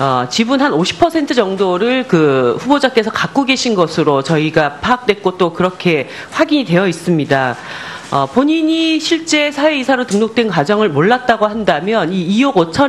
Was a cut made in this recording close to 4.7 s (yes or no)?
no